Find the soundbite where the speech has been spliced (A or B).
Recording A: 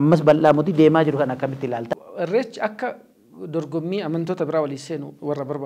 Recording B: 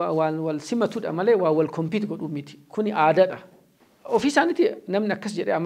A